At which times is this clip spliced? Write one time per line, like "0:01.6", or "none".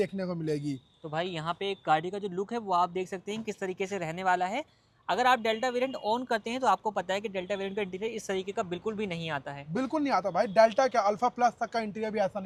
none